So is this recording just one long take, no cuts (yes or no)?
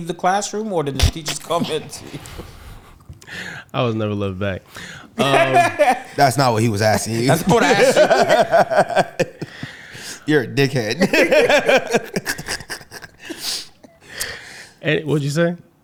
yes